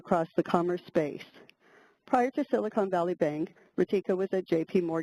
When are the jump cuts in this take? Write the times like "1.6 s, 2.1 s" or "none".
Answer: 3.1 s